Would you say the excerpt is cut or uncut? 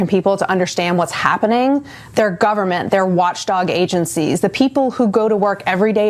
uncut